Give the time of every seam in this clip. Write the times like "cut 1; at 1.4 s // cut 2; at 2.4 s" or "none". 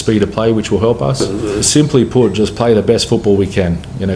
cut 1; at 1.4 s